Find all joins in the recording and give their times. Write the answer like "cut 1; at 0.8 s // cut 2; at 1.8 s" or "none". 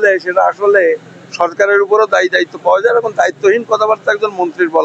none